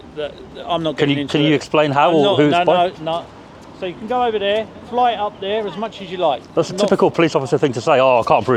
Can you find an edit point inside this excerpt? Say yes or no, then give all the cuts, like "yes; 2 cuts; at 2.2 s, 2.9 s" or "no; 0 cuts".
no; 0 cuts